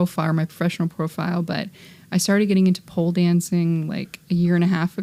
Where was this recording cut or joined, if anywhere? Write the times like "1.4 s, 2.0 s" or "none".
none